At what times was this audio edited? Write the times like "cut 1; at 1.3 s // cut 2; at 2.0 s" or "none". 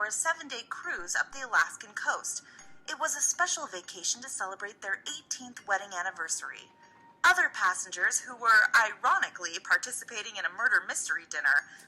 cut 1; at 8.6 s